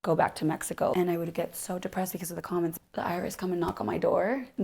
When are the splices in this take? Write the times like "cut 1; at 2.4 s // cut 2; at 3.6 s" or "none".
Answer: cut 1; at 0.9 s // cut 2; at 2.7 s